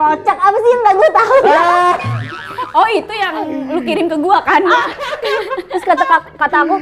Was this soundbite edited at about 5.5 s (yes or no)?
no